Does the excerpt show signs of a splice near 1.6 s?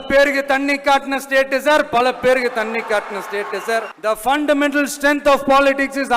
no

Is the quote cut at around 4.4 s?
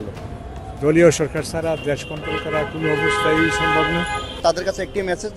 yes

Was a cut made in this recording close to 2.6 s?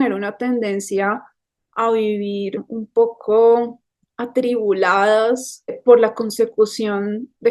yes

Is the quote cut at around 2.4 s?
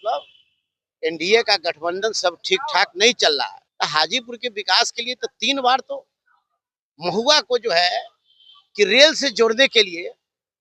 no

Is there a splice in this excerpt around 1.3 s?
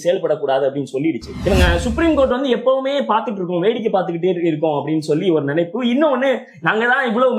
yes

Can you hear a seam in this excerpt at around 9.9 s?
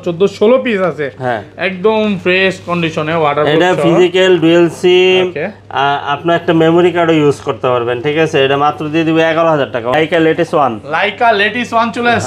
yes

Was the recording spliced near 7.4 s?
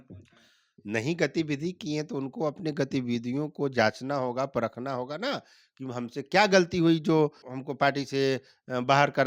yes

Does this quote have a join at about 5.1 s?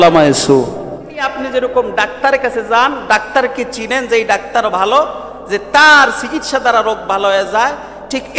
no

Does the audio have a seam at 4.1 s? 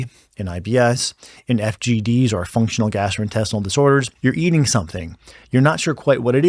yes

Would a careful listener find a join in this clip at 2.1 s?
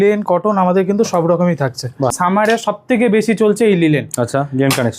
yes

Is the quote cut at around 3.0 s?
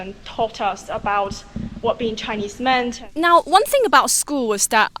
yes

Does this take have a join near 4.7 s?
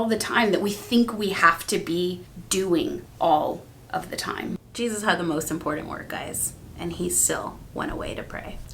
yes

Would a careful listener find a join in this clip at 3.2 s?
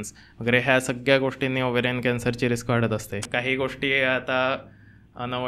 yes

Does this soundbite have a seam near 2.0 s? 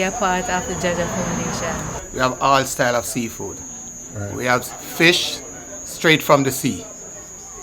yes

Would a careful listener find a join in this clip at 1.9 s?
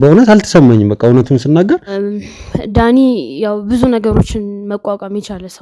yes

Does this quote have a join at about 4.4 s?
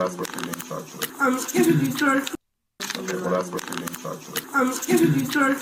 yes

